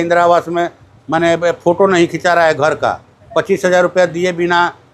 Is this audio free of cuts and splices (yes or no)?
yes